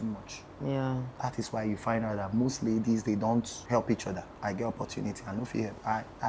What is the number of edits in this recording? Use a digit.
3